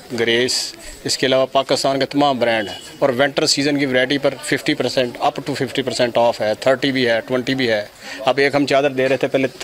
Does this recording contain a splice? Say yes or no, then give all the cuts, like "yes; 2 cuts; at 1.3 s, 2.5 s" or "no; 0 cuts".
no; 0 cuts